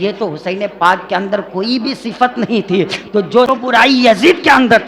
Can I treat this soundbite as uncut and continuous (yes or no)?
no